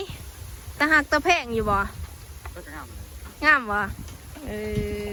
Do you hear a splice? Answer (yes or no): no